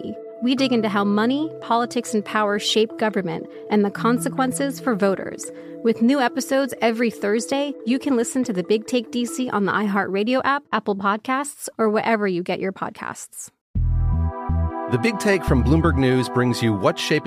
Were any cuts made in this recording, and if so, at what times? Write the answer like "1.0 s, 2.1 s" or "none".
13.6 s